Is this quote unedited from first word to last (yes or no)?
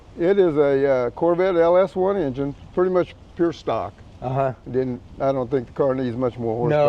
yes